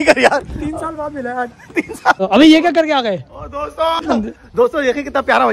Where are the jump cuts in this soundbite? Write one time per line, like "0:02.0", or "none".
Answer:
0:02.2
0:04.0